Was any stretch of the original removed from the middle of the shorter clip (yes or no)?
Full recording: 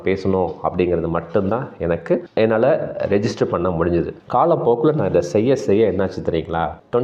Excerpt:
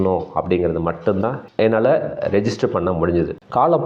yes